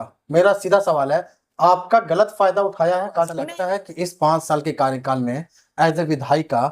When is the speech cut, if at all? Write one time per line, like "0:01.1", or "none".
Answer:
0:03.4